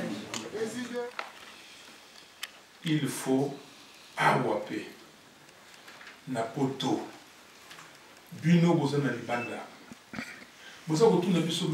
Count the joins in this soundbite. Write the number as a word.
one